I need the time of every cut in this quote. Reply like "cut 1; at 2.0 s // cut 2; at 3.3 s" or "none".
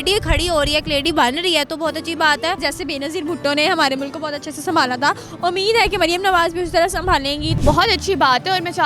cut 1; at 2.6 s // cut 2; at 7.6 s